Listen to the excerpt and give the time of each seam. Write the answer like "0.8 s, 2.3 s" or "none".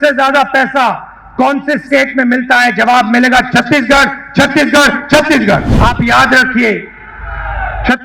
5.7 s